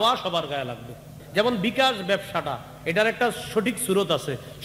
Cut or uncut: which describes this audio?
cut